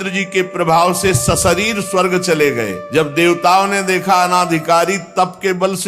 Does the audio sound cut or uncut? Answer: cut